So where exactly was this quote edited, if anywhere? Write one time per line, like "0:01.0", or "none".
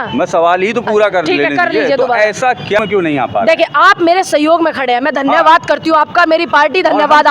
0:02.8